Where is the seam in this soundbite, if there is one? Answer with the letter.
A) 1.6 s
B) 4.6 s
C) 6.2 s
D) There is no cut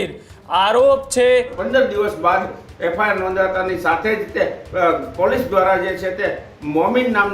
A